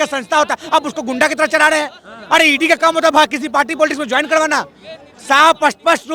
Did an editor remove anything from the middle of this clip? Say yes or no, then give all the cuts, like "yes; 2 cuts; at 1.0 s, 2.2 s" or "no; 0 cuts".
no; 0 cuts